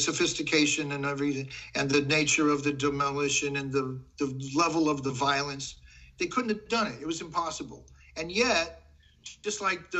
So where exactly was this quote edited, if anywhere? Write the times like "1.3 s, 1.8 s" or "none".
none